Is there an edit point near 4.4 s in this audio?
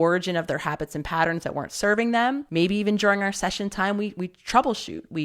no; 1 cut; at 2.4 s

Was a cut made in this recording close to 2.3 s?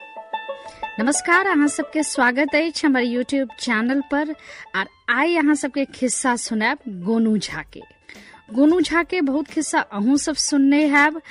no; 1 cut; at 0.9 s

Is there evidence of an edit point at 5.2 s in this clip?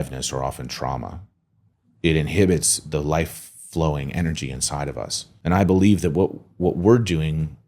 yes; 1 cut; at 5.2 s

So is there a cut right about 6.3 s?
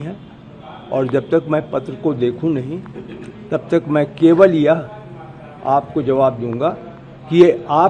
no; 0 cuts

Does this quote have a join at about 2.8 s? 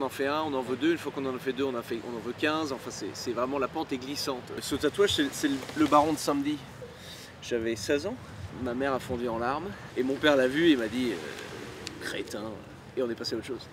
no; 4 cuts; at 4.5 s, 8.5 s, 9.8 s, 12.8 s

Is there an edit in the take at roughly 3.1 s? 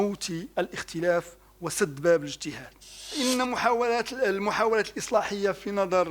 yes; 1 cut; at 3.1 s

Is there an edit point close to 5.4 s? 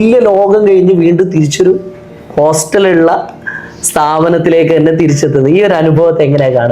no; 0 cuts

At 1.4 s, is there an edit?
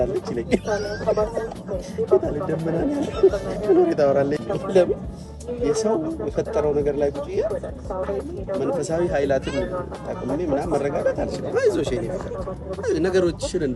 no; 1 cut; at 4.3 s

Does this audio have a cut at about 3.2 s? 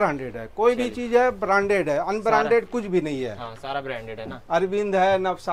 no; 0 cuts

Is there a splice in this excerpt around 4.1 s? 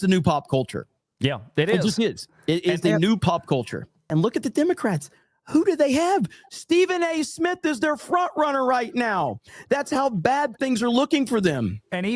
yes; 1 cut; at 4.1 s

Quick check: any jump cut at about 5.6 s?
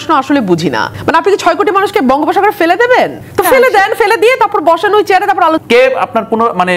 yes; 3 cuts; at 0.9 s, 3.2 s, 5.6 s

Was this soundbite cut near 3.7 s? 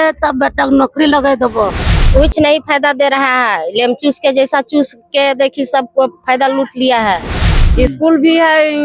no; 2 cuts; at 2.0 s, 7.5 s

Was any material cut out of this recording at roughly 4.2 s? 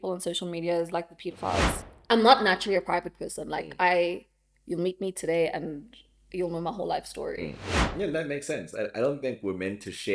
no; 2 cuts; at 1.8 s, 7.7 s

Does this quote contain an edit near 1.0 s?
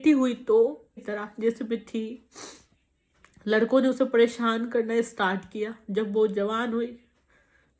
yes; 1 cut; at 1.0 s

